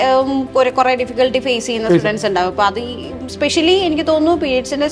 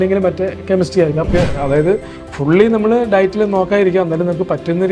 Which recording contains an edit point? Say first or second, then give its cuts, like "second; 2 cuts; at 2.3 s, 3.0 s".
second; 1 cut; at 1.3 s